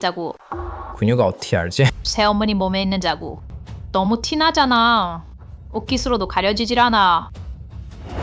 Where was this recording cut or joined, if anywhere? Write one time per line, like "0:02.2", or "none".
0:02.0